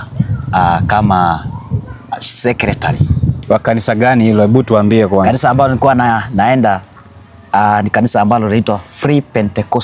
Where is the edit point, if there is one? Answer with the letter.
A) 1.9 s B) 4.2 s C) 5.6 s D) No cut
D